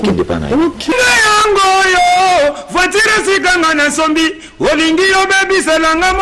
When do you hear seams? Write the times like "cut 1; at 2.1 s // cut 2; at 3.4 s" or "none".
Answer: cut 1; at 0.9 s